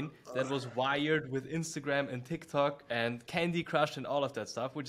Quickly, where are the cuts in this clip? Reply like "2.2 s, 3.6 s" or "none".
2.8 s